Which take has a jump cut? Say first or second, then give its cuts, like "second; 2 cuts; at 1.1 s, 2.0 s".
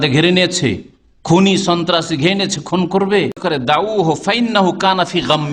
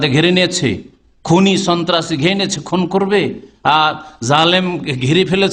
first; 1 cut; at 3.4 s